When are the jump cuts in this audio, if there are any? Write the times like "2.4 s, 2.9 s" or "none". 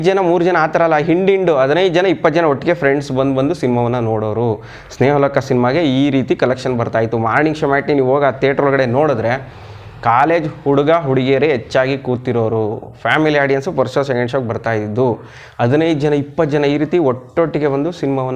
none